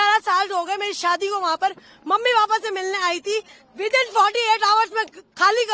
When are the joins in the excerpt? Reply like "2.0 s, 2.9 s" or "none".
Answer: none